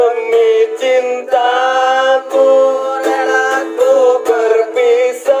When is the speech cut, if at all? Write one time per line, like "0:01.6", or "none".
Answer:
none